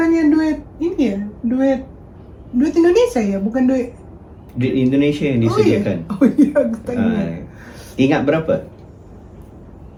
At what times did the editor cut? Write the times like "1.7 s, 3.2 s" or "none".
none